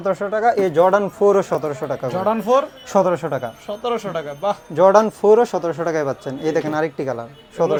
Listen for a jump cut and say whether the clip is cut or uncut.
uncut